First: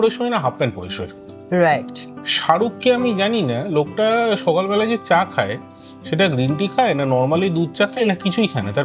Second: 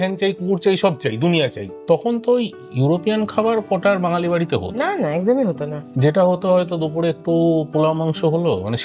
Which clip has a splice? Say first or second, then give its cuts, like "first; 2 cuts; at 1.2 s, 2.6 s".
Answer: second; 1 cut; at 1.8 s